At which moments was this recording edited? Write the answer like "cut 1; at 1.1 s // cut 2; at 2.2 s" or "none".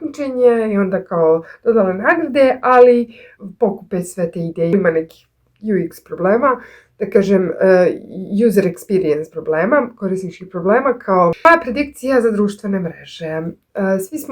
cut 1; at 4.7 s // cut 2; at 11.4 s